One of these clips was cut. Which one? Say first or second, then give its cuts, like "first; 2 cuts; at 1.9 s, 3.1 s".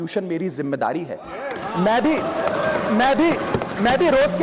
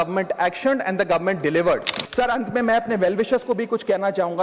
second; 1 cut; at 2.0 s